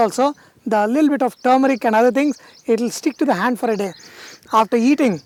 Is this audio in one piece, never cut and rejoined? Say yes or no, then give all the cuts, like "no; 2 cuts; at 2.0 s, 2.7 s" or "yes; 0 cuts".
yes; 0 cuts